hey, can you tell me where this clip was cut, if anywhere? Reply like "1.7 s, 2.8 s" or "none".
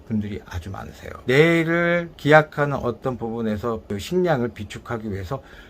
1.1 s